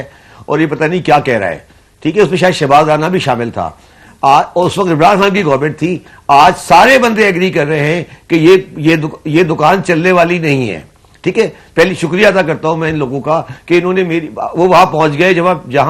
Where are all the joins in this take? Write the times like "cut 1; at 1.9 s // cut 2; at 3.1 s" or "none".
none